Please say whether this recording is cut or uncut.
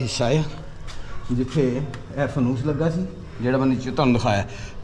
uncut